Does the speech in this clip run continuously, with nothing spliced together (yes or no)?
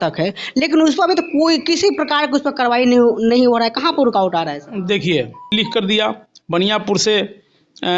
no